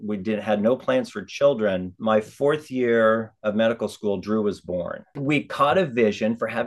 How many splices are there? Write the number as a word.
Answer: two